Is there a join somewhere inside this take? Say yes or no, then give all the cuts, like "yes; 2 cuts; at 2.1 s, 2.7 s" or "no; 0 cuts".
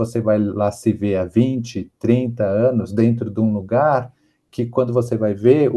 no; 0 cuts